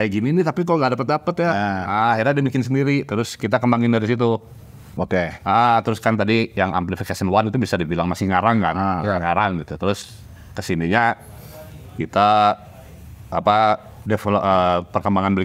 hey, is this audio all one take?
yes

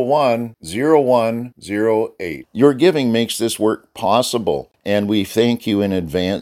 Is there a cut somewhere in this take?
yes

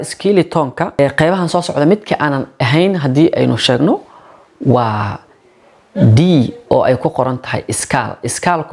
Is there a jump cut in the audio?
yes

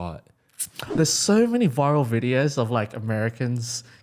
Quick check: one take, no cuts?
no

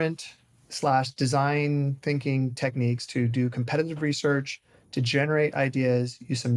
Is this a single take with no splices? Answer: yes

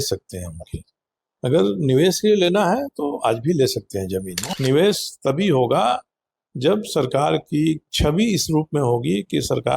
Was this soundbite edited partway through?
yes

